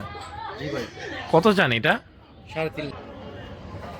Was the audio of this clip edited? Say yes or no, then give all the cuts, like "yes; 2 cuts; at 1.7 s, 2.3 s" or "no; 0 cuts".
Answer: yes; 1 cut; at 2.9 s